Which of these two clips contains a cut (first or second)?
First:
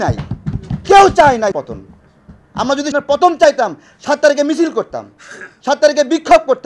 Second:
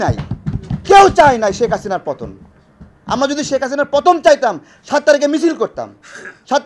first